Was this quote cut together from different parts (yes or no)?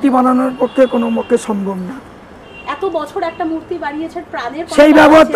no